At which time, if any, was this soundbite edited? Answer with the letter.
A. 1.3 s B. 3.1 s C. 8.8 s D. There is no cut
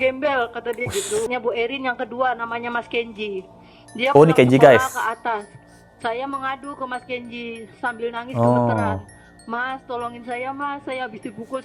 A